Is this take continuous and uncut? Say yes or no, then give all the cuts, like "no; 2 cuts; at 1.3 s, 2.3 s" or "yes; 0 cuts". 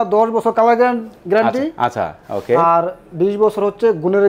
yes; 0 cuts